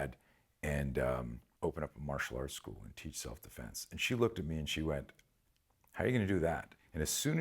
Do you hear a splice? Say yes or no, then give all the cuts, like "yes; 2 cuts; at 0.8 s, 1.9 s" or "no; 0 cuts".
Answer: yes; 1 cut; at 1.4 s